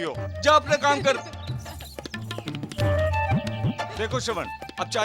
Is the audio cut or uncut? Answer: uncut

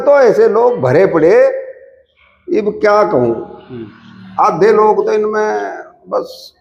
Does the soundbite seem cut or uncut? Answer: uncut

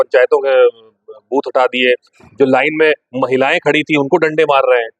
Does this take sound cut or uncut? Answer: uncut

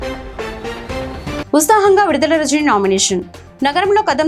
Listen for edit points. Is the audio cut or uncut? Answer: cut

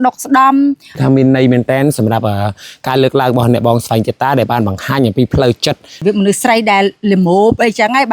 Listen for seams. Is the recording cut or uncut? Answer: cut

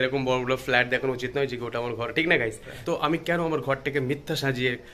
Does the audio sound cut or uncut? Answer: cut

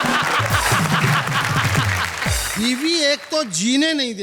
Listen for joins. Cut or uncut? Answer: uncut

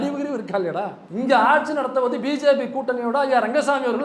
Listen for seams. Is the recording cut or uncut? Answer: cut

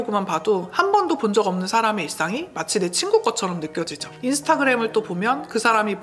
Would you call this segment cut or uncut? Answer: cut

